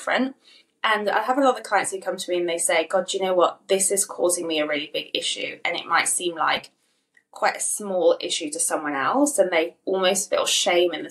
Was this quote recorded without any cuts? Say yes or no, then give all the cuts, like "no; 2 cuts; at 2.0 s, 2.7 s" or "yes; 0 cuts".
yes; 0 cuts